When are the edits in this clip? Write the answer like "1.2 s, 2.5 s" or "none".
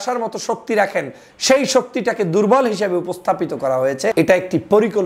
4.1 s

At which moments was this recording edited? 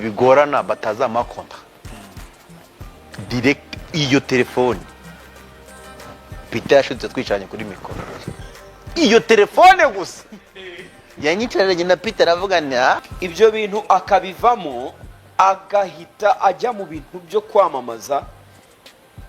13.1 s

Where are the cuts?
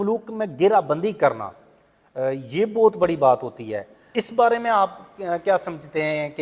none

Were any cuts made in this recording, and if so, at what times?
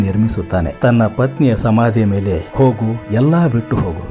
none

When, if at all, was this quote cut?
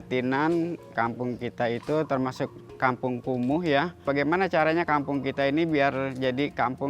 0.9 s, 4.1 s

